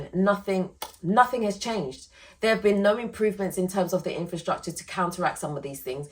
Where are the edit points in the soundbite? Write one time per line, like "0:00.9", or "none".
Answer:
none